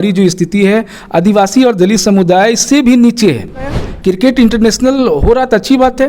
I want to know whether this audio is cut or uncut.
cut